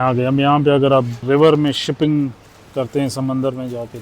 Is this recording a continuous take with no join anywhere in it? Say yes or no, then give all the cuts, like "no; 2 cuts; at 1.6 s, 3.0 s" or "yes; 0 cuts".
no; 1 cut; at 1.1 s